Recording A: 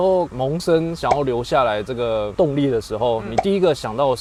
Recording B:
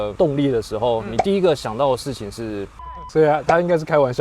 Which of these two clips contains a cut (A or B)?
B